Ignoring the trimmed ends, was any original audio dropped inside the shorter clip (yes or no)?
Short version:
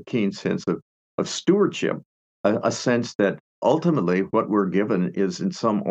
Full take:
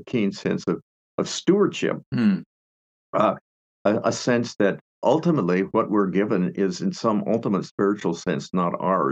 yes